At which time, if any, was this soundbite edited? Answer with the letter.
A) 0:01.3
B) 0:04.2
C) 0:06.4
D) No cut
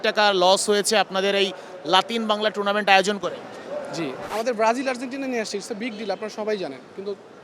B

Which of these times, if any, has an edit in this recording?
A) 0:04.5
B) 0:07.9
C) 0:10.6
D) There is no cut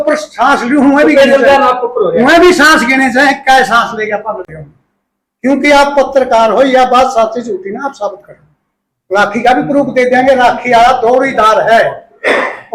A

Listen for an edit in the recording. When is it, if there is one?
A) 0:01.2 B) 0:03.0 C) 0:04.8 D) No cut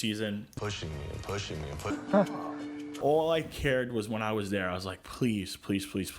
B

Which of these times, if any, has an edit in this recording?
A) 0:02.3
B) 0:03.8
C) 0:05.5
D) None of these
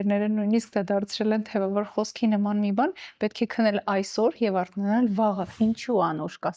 C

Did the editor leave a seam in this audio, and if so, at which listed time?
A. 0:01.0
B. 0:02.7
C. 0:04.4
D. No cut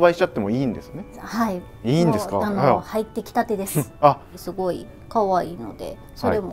C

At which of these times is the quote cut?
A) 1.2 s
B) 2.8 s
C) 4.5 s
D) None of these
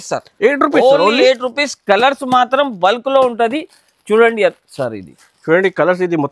D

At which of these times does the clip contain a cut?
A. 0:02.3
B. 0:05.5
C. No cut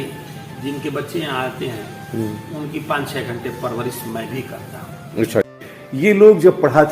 B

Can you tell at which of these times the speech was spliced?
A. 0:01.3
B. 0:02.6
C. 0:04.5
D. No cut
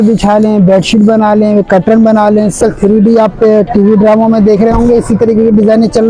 B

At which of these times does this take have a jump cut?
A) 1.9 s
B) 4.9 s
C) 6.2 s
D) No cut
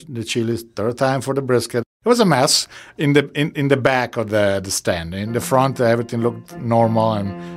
A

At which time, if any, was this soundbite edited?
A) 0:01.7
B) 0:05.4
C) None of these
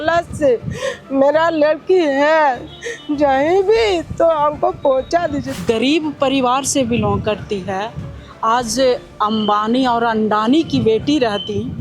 B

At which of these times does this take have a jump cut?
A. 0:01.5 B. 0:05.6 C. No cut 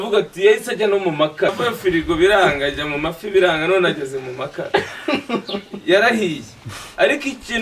A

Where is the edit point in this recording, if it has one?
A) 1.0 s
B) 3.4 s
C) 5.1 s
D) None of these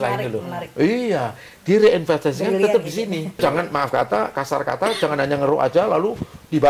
B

